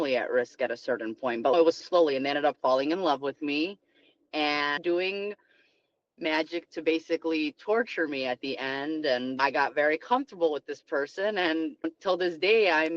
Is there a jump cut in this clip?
no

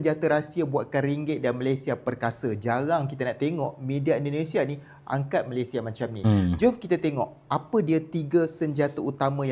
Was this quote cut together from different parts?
no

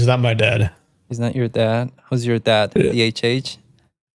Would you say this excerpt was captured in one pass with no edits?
yes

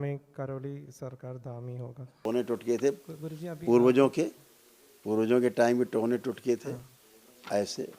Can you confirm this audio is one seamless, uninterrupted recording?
no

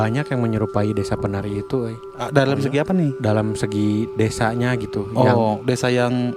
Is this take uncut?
yes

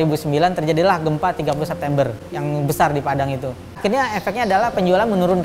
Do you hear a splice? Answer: yes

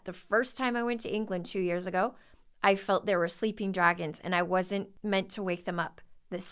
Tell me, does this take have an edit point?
yes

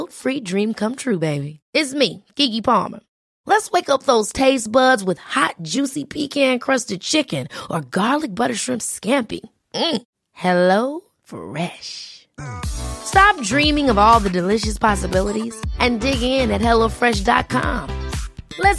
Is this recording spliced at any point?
no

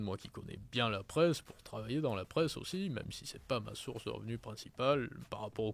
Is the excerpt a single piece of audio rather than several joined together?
yes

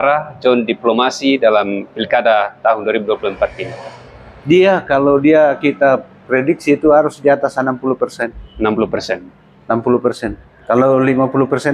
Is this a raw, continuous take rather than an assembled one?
yes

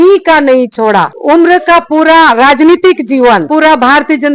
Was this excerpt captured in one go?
no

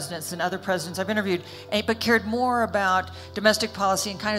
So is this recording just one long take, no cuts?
yes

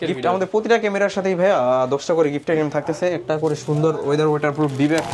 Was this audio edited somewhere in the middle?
no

